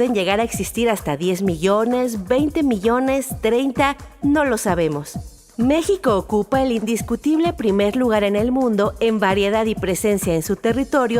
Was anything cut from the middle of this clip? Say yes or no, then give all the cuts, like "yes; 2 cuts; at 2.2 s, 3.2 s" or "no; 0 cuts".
yes; 1 cut; at 7.2 s